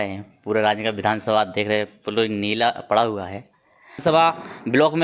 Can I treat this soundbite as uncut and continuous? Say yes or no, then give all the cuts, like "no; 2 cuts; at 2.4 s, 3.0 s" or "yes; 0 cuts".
no; 1 cut; at 4.0 s